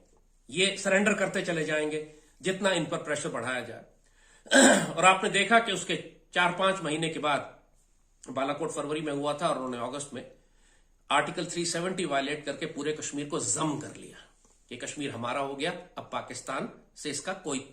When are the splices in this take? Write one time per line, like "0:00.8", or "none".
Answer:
none